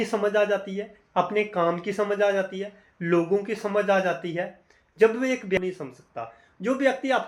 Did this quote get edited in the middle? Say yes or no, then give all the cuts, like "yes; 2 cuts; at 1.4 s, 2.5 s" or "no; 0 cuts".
yes; 1 cut; at 5.6 s